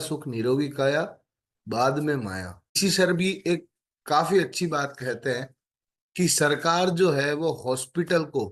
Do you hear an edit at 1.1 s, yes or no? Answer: no